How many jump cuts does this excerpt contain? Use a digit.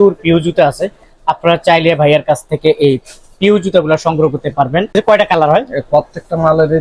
1